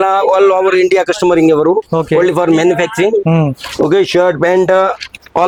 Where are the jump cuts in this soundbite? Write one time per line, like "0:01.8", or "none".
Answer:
none

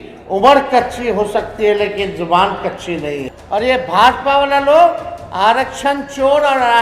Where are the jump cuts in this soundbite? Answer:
0:03.3

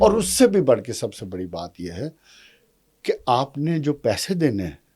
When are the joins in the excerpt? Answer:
none

